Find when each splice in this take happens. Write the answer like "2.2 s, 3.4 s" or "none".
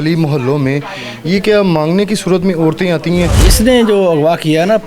3.4 s